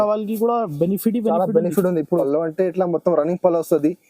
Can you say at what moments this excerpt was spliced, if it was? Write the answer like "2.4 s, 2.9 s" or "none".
2.2 s

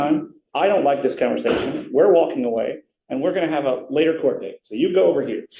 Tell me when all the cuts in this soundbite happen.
none

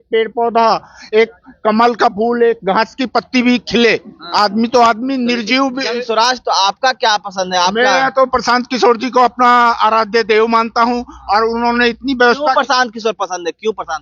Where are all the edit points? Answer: none

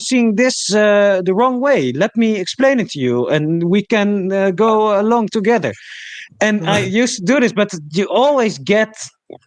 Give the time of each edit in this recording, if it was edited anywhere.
none

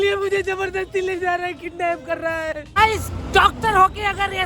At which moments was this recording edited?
2.6 s

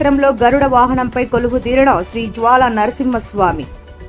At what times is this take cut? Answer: none

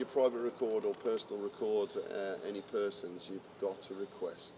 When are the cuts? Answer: none

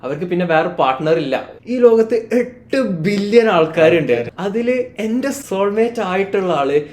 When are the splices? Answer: 1.5 s, 4.3 s, 5.4 s

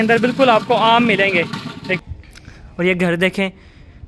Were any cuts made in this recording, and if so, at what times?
2.0 s

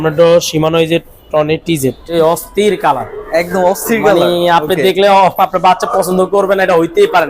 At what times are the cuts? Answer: 2.0 s

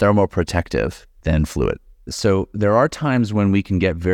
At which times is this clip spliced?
1.1 s, 1.9 s

